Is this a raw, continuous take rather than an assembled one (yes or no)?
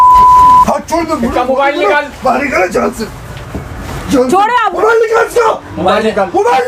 yes